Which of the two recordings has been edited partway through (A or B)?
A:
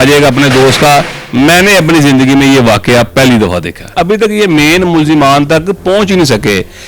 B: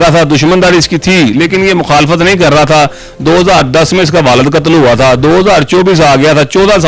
A